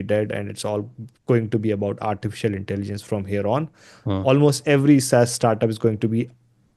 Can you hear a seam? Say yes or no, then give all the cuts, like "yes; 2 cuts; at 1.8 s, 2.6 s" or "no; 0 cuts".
no; 0 cuts